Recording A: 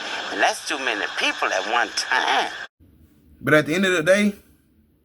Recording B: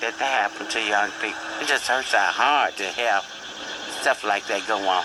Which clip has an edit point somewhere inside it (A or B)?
A